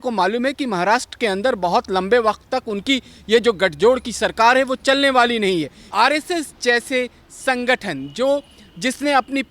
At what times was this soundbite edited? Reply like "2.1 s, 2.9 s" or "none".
5.9 s